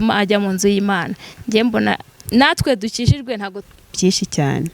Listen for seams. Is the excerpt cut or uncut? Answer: cut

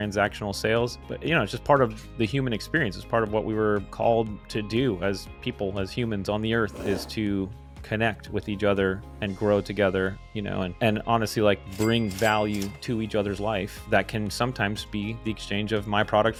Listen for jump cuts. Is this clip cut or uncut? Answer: uncut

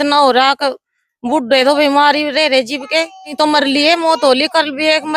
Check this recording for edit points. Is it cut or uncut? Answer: cut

